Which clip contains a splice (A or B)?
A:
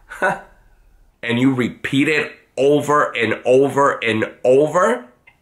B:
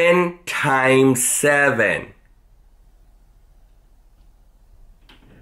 A